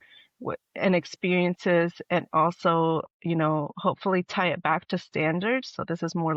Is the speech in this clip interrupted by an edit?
no; 0 cuts

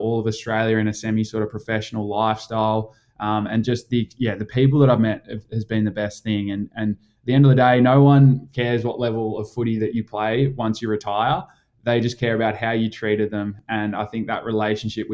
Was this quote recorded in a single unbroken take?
yes; 0 cuts

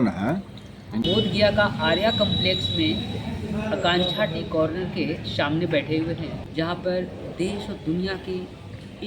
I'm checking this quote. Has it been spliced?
yes; 2 cuts; at 0.9 s, 6.4 s

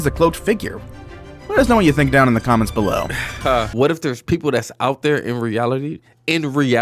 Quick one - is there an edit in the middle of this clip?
yes; 1 cut; at 3.7 s

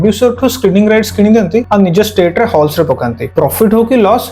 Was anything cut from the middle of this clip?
yes; 2 cuts; at 1.7 s, 3.2 s

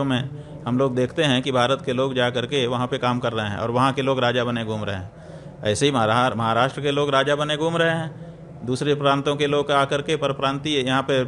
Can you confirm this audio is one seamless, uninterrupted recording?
yes; 0 cuts

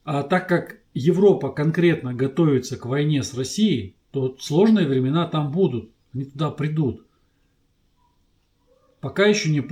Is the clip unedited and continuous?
yes; 0 cuts

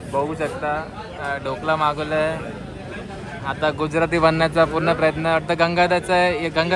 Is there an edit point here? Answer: no; 0 cuts

